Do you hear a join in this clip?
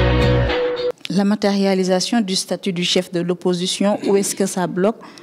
yes; 1 cut; at 0.9 s

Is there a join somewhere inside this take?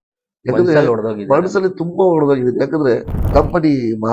yes; 1 cut; at 3.2 s

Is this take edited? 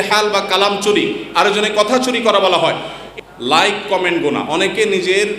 yes; 1 cut; at 2.9 s

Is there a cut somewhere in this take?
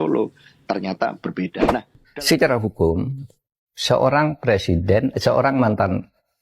yes; 1 cut; at 2.0 s

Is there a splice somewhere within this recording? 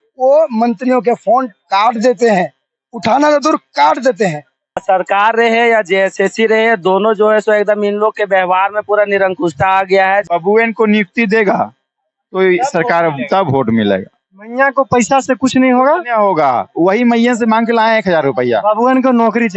yes; 2 cuts; at 4.8 s, 10.3 s

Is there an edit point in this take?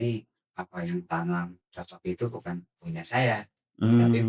no; 0 cuts

